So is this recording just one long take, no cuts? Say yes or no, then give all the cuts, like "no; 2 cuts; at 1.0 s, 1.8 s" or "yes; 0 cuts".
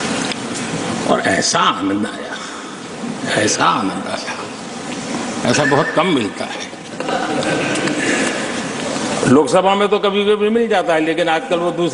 yes; 0 cuts